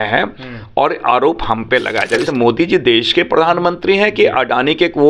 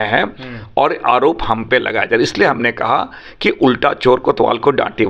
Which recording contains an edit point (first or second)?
first